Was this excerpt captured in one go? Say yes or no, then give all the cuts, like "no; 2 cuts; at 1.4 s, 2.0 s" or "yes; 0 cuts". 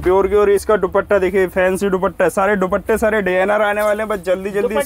yes; 0 cuts